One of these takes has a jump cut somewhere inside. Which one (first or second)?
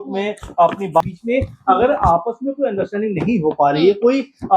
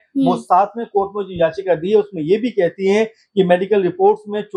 first